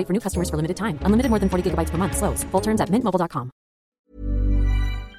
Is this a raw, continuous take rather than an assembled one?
no; 1 cut; at 4.0 s

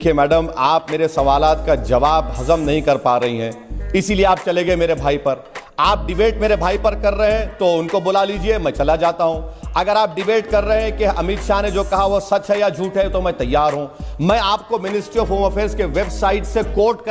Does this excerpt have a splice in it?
no; 0 cuts

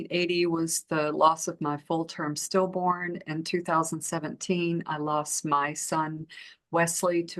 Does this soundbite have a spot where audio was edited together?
no; 0 cuts

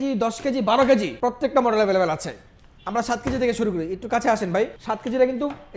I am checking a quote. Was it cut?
no; 0 cuts

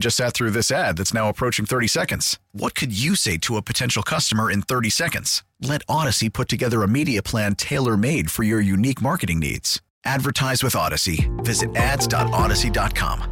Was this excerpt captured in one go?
yes; 0 cuts

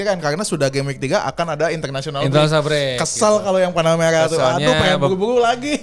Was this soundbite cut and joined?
no; 0 cuts

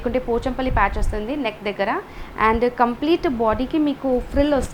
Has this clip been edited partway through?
no; 0 cuts

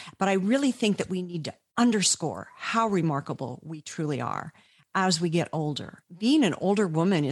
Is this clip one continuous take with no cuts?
no; 1 cut; at 6.0 s

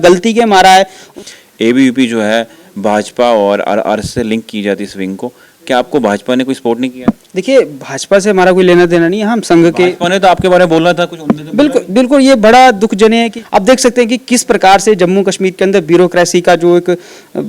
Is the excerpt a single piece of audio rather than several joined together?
no; 2 cuts; at 1.0 s, 13.4 s

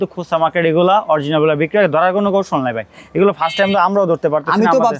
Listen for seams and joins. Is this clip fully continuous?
yes; 0 cuts

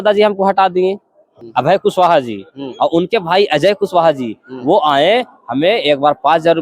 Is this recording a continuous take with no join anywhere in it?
no; 1 cut; at 1.3 s

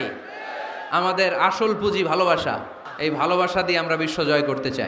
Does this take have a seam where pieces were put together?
yes; 1 cut; at 2.8 s

